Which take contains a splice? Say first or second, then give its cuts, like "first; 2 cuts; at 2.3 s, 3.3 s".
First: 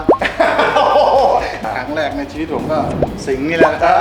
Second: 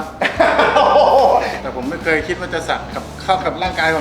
second; 1 cut; at 1.6 s